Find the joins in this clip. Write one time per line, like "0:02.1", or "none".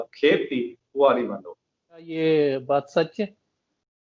0:02.2